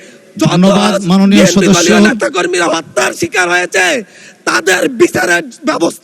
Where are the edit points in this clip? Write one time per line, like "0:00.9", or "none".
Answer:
none